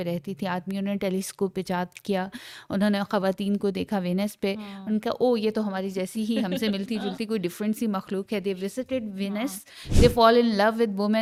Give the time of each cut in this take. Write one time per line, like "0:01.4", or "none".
none